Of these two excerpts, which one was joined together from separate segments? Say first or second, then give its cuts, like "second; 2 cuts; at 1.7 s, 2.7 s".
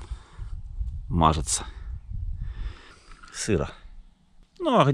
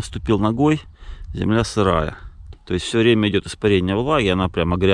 first; 1 cut; at 2.9 s